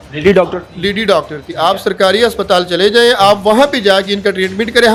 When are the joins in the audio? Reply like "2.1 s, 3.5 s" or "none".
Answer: none